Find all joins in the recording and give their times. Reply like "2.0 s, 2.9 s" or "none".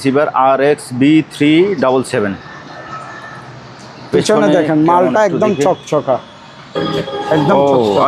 none